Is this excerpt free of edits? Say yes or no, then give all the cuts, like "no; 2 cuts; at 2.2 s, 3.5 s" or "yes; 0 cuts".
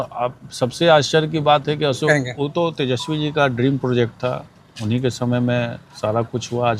no; 1 cut; at 2.1 s